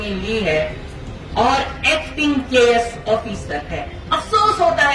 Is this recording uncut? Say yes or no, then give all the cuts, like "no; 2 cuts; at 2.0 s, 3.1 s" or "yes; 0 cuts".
yes; 0 cuts